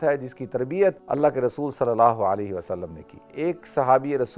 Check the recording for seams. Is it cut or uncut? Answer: cut